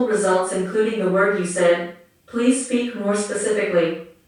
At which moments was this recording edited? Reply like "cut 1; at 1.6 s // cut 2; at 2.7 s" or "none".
none